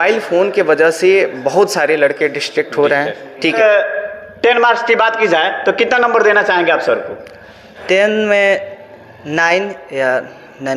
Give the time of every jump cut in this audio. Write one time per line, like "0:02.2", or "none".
0:03.4